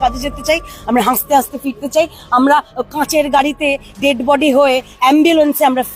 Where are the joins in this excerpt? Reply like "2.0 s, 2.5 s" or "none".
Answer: none